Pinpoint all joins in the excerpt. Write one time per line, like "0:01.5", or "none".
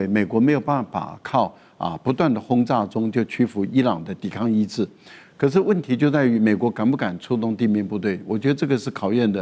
none